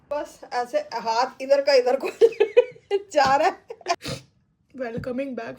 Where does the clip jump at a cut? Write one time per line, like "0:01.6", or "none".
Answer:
0:03.9